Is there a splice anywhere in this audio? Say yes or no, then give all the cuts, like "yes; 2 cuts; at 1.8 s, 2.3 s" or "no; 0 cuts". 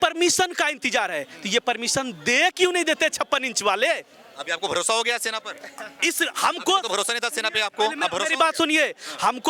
no; 0 cuts